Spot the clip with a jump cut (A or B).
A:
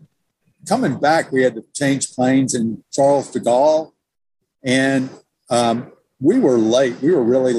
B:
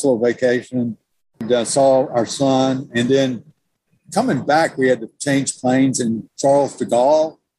B